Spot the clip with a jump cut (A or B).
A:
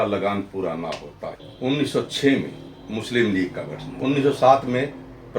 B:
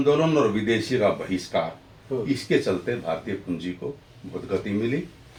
A